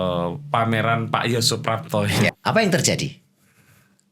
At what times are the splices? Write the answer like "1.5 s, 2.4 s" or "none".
2.4 s